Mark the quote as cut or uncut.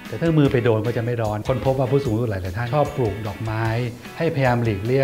cut